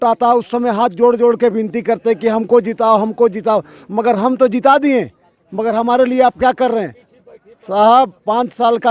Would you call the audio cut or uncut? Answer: uncut